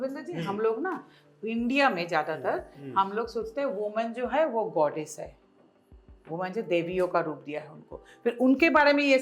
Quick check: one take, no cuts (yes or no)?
yes